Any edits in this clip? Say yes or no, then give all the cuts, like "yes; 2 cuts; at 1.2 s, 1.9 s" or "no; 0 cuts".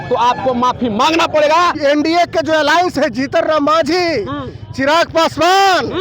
yes; 1 cut; at 1.8 s